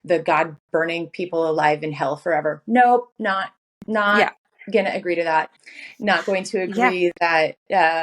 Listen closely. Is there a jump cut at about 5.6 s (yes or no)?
yes